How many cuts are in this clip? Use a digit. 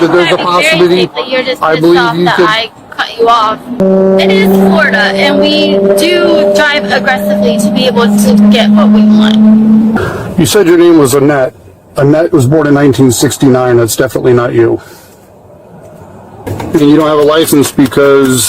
3